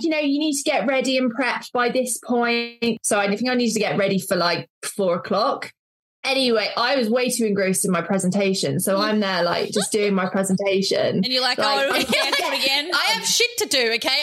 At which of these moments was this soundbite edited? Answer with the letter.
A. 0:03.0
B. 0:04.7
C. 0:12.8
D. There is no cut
A